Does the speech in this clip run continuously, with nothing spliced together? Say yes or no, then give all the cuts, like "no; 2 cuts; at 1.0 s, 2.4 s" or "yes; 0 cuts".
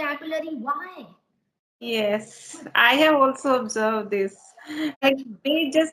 no; 1 cut; at 5.0 s